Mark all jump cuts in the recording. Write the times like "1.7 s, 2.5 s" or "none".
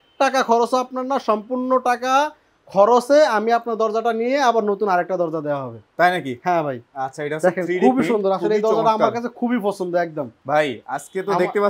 6.9 s

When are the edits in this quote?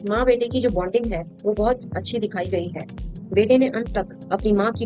none

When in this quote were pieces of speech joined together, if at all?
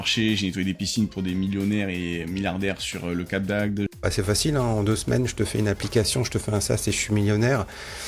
4.0 s

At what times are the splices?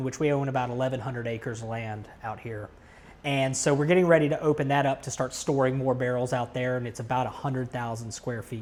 none

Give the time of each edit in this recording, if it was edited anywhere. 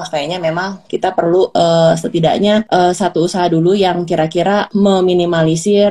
1.5 s, 2.7 s, 4.7 s

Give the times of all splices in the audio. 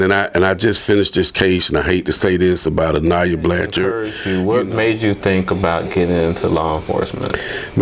4.1 s

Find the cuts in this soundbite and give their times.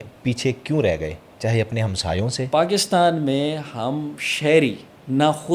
2.5 s

